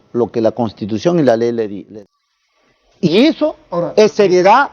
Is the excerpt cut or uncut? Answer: cut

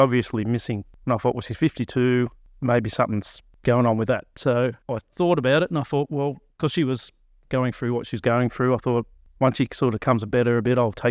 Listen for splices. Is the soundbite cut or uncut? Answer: cut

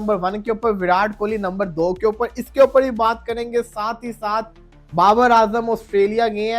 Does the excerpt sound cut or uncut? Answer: uncut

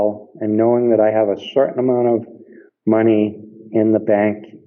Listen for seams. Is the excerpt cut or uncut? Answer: uncut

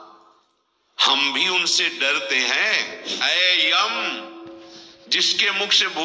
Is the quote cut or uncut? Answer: cut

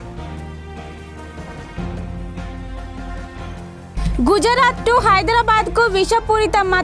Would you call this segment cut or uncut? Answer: cut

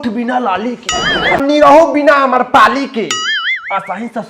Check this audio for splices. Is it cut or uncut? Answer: cut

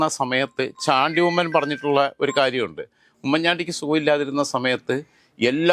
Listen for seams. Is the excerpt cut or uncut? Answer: uncut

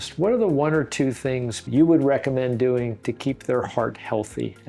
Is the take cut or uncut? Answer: cut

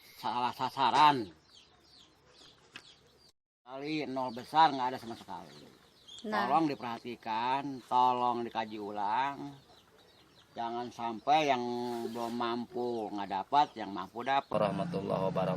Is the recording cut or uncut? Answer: cut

